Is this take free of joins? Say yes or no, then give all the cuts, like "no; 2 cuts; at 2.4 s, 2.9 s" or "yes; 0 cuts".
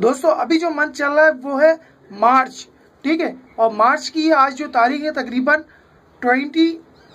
yes; 0 cuts